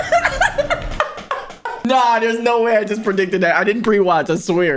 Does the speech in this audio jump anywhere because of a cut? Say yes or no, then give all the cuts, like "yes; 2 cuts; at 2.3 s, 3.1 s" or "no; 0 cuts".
yes; 1 cut; at 1.8 s